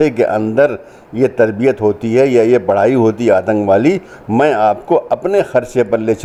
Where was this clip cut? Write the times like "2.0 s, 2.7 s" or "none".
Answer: none